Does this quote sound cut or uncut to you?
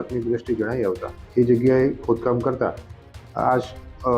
cut